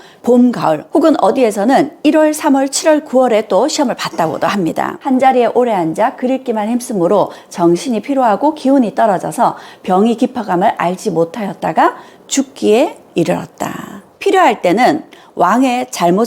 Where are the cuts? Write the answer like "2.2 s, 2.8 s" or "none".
5.0 s, 14.0 s